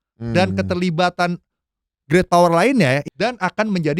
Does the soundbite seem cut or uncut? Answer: cut